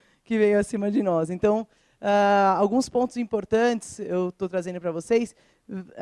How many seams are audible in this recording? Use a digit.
1